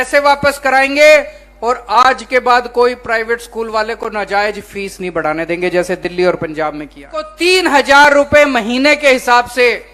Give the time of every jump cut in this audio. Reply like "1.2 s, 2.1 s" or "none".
7.3 s